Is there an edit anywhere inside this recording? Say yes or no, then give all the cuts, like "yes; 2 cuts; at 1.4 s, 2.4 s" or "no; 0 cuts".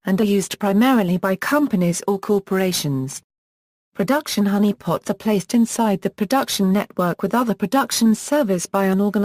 yes; 1 cut; at 1.2 s